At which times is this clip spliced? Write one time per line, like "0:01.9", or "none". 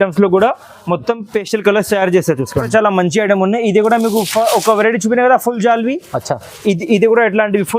0:02.7